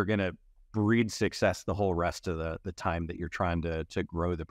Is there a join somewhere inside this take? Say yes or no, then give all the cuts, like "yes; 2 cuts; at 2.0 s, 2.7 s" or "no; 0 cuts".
no; 0 cuts